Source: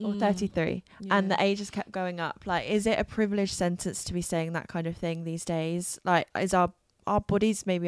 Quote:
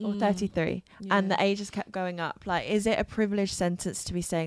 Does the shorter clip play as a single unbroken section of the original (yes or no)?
yes